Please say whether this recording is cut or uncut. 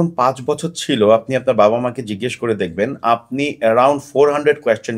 uncut